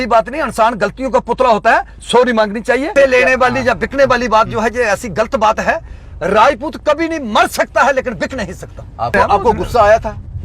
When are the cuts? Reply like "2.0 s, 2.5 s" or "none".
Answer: 2.9 s, 9.1 s